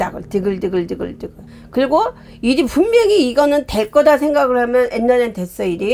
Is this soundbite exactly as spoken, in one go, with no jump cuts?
yes; 0 cuts

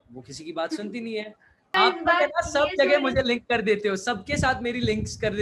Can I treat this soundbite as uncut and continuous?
no; 1 cut; at 1.7 s

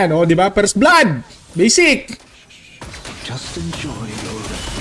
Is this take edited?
no; 0 cuts

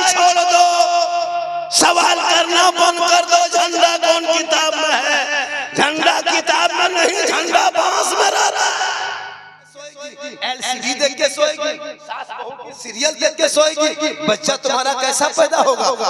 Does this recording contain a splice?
yes; 1 cut; at 10.2 s

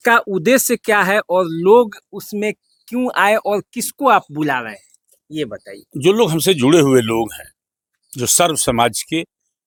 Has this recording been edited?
no; 0 cuts

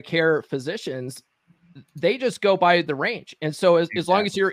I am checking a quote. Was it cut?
no; 0 cuts

